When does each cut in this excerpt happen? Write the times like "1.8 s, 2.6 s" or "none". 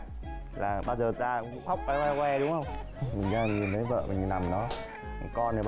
none